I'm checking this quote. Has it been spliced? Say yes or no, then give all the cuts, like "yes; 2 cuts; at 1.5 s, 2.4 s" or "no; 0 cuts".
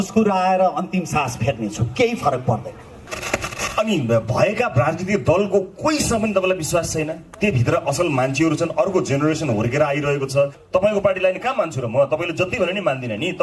yes; 2 cuts; at 3.0 s, 10.6 s